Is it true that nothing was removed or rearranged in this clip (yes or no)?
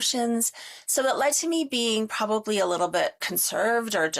no